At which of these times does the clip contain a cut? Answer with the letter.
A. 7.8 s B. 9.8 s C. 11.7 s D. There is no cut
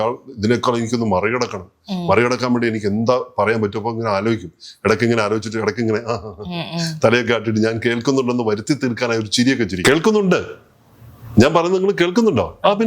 B